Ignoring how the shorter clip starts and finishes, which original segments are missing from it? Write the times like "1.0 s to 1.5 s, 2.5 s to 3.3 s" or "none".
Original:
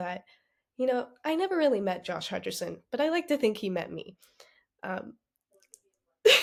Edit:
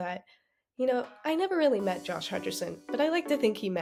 none

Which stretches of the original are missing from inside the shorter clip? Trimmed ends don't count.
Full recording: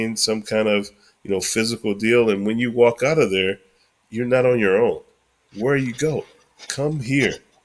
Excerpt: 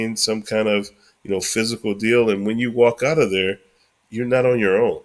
none

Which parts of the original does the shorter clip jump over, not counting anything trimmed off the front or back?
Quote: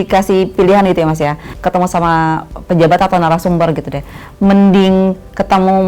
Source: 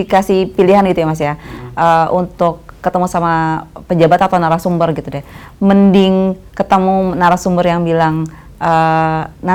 1.5 s to 2.7 s

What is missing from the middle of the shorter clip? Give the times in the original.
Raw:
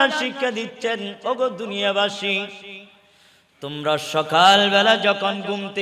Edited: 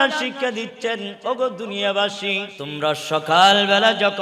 2.6 s to 3.6 s

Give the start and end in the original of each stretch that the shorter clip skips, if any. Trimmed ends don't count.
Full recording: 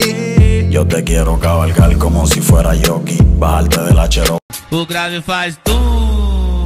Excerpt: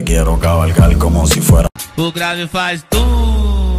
2.7 s to 4.4 s

